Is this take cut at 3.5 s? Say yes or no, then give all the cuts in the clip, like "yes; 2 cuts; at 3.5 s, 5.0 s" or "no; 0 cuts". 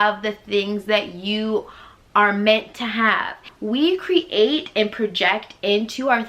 yes; 1 cut; at 3.5 s